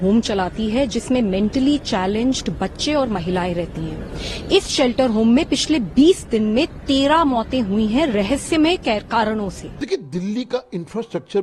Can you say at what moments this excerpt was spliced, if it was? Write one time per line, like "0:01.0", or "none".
0:09.7